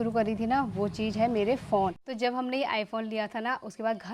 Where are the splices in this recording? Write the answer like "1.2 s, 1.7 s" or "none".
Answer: 2.0 s